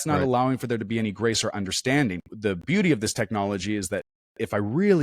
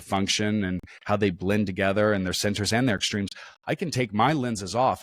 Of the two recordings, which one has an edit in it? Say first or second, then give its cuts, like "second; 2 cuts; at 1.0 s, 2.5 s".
first; 1 cut; at 2.3 s